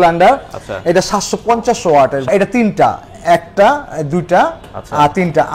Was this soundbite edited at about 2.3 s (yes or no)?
yes